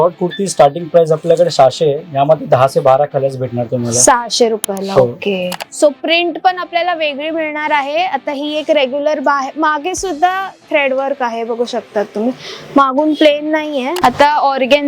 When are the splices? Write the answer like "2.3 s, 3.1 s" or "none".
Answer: 5.5 s, 13.9 s

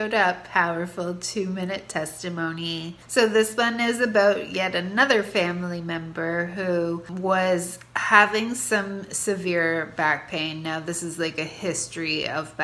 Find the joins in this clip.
3.0 s, 7.1 s

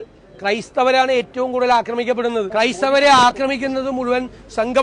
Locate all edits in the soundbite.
2.5 s

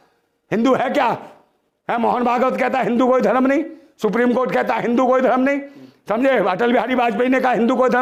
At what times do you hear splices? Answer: none

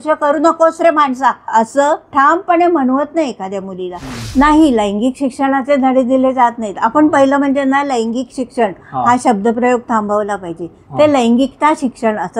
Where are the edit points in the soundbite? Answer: 1.5 s, 4.2 s

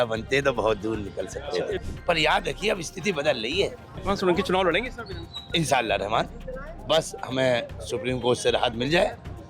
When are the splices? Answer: 1.8 s, 4.0 s

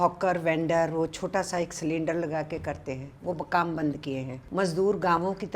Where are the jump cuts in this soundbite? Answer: 4.4 s

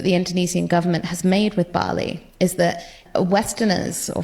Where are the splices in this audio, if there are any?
3.0 s

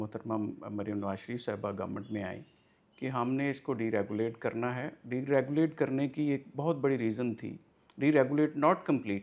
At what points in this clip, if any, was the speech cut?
none

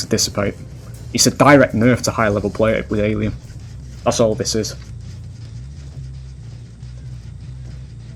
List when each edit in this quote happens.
none

